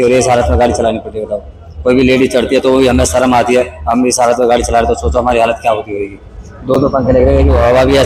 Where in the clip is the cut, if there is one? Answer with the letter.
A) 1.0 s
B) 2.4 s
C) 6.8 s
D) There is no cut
D